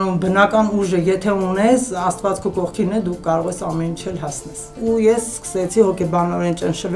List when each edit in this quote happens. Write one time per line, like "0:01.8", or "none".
0:04.8